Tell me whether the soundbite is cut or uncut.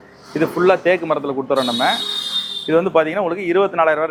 uncut